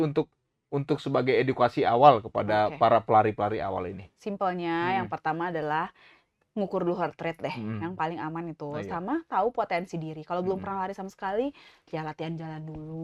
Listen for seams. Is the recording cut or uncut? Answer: uncut